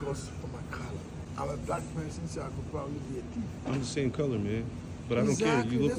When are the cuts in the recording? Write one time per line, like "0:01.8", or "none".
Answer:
0:01.2